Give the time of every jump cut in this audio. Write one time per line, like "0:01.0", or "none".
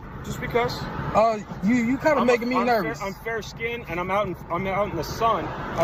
none